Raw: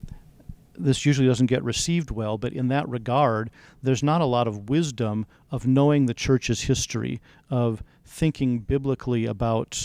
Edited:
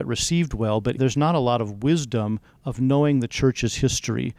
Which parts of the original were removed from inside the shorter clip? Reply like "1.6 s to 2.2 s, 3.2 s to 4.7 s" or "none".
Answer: 2.5 s to 3.8 s